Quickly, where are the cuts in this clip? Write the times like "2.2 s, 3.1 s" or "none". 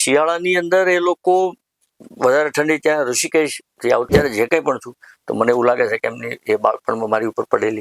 4.1 s